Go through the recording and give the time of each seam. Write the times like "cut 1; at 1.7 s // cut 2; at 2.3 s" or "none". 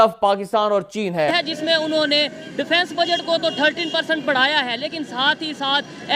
cut 1; at 1.3 s